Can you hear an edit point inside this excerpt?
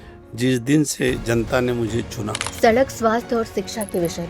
yes; 1 cut; at 2.4 s

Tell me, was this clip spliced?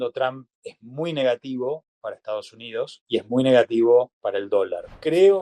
yes; 2 cuts; at 3.0 s, 4.6 s

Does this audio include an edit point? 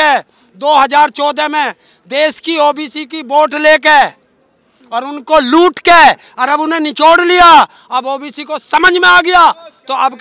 no; 0 cuts

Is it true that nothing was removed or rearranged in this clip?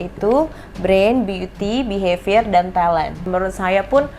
no; 1 cut; at 3.3 s

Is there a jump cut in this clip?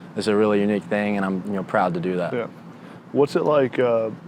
no; 0 cuts

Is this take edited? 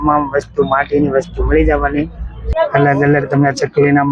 yes; 1 cut; at 2.5 s

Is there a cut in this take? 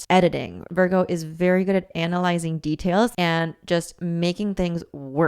yes; 1 cut; at 3.1 s

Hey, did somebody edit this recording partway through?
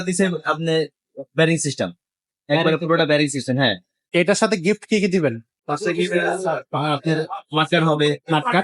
yes; 2 cuts; at 4.1 s, 5.5 s

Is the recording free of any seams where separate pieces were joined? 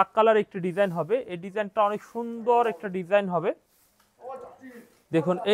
yes; 0 cuts

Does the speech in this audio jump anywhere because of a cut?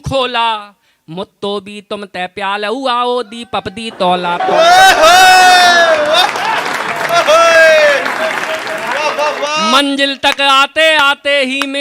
no; 0 cuts

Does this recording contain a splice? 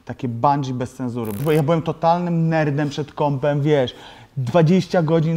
yes; 1 cut; at 1.4 s

